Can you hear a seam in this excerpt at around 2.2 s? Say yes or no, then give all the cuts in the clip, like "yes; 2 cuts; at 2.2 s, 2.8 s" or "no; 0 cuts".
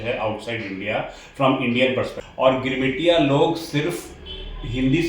yes; 1 cut; at 2.2 s